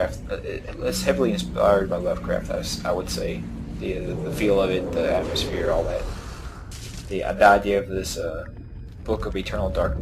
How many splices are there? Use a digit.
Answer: 1